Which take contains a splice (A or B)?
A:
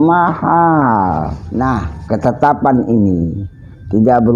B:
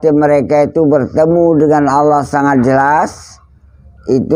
A